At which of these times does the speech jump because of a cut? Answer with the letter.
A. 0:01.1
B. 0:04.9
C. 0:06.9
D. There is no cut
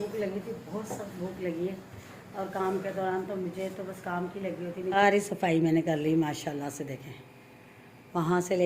B